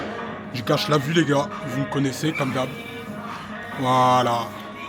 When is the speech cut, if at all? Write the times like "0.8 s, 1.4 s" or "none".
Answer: none